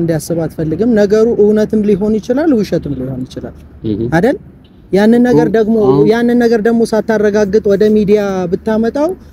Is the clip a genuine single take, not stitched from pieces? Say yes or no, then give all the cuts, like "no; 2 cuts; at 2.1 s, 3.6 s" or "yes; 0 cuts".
yes; 0 cuts